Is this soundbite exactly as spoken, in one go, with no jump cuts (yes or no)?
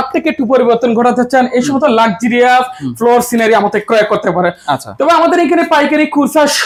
yes